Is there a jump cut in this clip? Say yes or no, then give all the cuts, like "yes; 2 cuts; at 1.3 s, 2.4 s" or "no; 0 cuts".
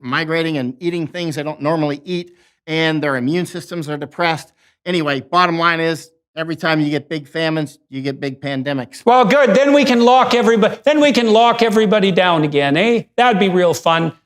yes; 1 cut; at 8.9 s